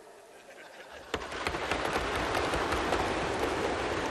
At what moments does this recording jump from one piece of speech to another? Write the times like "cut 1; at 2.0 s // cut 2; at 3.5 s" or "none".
none